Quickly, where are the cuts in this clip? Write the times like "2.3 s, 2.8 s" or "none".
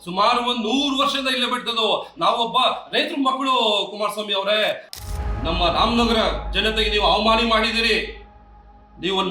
4.9 s